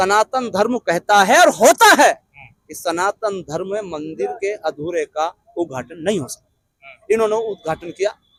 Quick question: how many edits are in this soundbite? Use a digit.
0